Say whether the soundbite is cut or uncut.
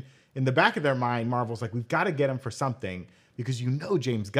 uncut